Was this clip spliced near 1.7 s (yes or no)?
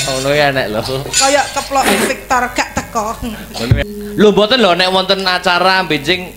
no